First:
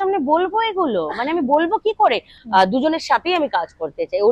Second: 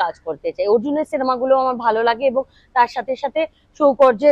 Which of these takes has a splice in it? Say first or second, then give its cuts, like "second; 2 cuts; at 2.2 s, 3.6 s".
first; 1 cut; at 2.3 s